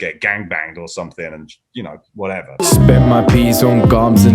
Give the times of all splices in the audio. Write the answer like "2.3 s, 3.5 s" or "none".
2.6 s